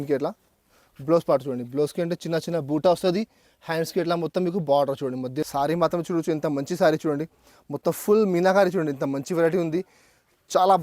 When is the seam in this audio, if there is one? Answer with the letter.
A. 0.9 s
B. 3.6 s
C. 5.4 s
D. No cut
C